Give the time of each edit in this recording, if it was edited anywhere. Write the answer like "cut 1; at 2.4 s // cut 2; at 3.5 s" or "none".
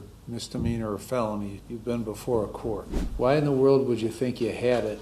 cut 1; at 1.6 s // cut 2; at 3.0 s